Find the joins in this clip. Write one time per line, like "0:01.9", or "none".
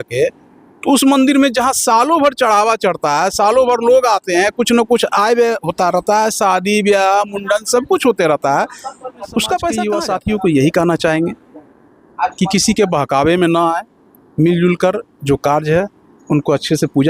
0:09.9